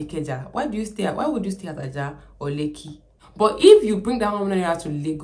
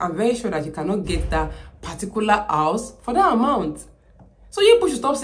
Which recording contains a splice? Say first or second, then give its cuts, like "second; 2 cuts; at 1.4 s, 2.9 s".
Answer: first; 1 cut; at 3.2 s